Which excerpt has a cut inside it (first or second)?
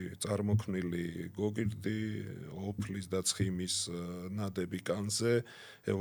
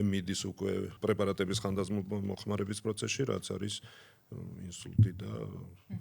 second